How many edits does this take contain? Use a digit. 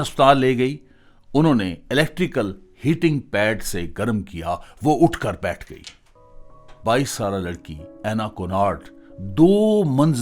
1